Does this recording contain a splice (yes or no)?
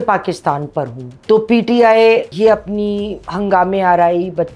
no